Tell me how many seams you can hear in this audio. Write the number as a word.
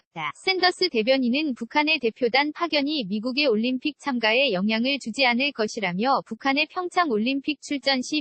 zero